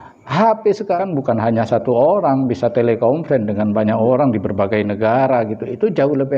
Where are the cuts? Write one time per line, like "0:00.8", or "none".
0:01.0